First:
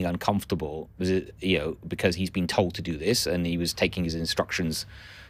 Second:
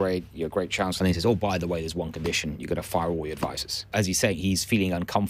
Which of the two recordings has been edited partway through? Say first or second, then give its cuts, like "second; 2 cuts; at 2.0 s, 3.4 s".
second; 2 cuts; at 0.9 s, 3.9 s